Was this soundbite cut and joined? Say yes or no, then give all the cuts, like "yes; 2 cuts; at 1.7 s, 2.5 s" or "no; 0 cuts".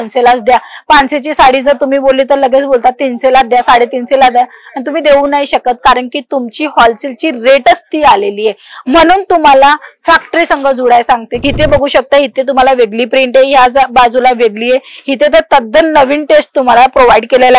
yes; 1 cut; at 11.3 s